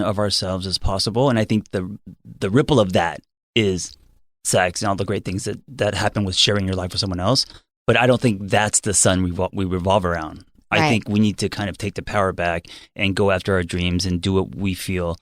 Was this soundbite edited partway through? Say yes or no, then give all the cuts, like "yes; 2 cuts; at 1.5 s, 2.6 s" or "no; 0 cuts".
no; 0 cuts